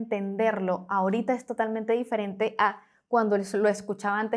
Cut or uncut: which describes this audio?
uncut